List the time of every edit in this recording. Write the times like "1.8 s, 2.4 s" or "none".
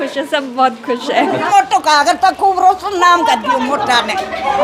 1.4 s